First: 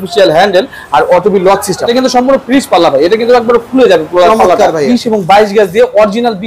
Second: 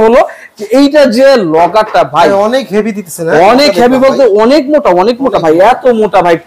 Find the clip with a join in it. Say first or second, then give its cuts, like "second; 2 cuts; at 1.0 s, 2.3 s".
first; 2 cuts; at 1.9 s, 4.9 s